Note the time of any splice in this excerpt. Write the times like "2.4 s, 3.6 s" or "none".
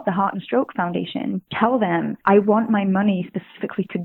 1.5 s, 2.1 s